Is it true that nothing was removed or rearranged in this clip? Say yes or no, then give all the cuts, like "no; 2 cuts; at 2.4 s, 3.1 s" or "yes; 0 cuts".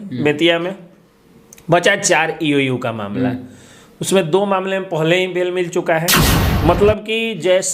no; 1 cut; at 6.4 s